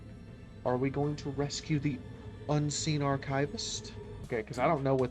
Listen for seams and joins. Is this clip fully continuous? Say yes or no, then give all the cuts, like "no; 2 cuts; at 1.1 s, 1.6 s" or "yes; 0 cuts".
no; 1 cut; at 4.1 s